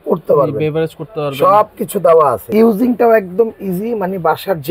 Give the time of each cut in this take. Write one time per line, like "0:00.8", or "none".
0:02.5